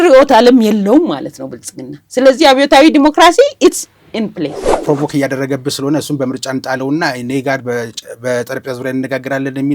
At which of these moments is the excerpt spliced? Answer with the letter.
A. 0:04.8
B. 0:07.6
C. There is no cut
A